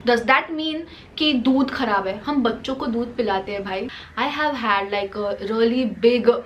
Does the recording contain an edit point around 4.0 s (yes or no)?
yes